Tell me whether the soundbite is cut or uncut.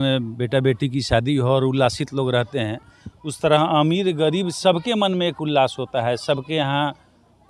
uncut